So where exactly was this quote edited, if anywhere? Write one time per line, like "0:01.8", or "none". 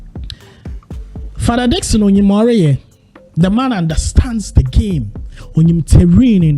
0:00.9